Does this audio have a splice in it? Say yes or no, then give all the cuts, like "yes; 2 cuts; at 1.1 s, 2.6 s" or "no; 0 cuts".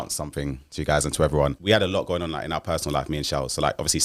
yes; 1 cut; at 1.6 s